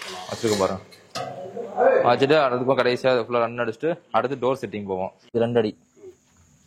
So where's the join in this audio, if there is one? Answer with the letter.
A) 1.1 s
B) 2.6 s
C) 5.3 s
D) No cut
C